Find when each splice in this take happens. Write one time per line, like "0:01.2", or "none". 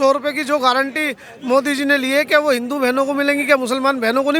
none